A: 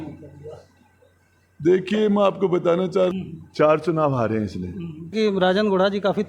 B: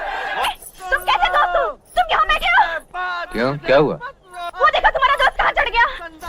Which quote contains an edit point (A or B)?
A